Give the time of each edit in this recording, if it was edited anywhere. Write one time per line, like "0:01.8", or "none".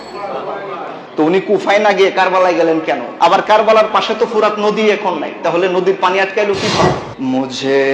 0:03.1
0:07.0